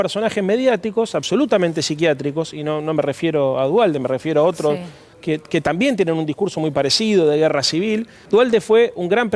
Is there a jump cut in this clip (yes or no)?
yes